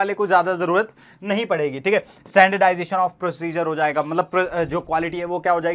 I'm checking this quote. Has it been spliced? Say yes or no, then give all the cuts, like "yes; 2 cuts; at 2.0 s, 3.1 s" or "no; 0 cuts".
no; 0 cuts